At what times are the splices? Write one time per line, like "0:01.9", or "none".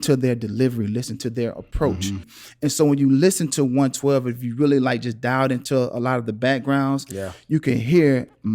0:02.2